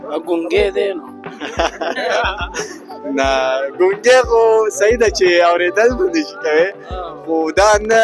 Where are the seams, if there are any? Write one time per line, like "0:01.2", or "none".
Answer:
none